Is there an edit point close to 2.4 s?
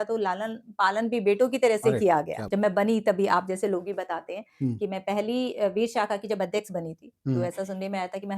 yes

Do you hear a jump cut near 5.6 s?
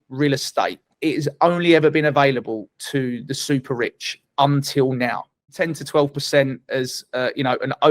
yes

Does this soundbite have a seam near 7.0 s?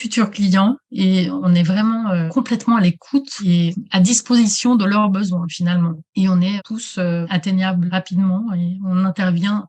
yes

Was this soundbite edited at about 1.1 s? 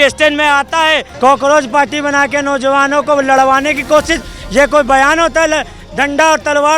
yes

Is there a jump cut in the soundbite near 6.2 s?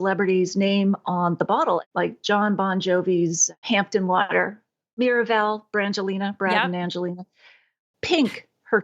no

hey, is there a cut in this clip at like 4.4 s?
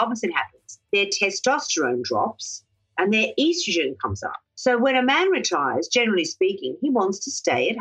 no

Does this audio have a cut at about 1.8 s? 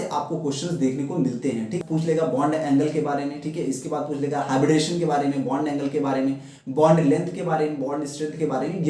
yes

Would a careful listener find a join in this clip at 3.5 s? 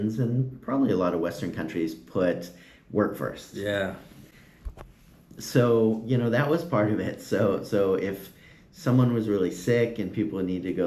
no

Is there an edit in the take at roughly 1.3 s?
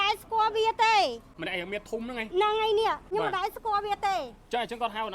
yes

